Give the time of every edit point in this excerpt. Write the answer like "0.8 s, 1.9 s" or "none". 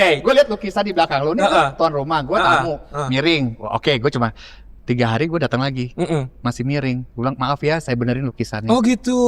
none